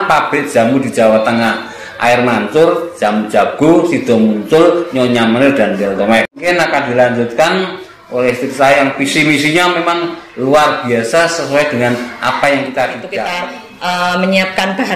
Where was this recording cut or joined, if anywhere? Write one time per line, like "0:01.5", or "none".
0:06.4
0:13.2